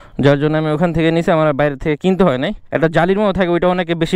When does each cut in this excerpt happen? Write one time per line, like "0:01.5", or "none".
0:02.6